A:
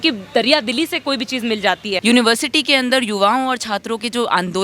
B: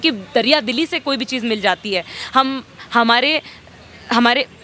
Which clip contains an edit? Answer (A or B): A